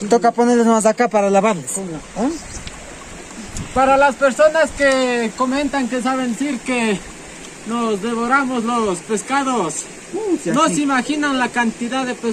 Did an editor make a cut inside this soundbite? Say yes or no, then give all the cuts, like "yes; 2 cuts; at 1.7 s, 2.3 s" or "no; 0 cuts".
no; 0 cuts